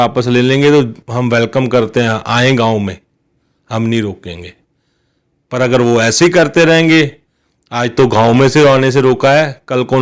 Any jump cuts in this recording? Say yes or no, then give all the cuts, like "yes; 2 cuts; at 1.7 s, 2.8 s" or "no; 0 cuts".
no; 0 cuts